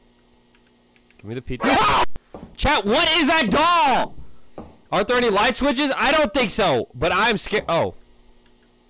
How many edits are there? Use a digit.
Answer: 1